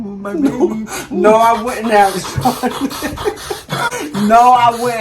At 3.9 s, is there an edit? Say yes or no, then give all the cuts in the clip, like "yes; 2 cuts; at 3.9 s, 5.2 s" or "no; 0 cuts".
yes; 1 cut; at 3.9 s